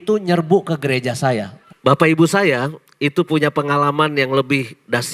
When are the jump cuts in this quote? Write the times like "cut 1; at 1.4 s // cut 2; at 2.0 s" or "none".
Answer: cut 1; at 1.6 s